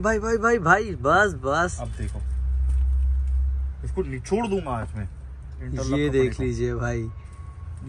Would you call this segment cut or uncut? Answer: uncut